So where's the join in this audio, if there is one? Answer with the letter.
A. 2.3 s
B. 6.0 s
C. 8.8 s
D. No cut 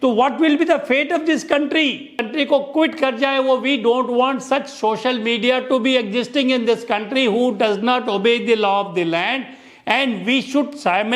A